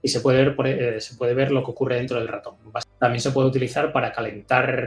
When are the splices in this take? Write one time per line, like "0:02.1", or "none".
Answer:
0:02.8